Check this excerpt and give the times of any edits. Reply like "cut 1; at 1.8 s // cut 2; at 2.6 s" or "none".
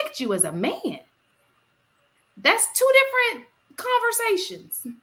none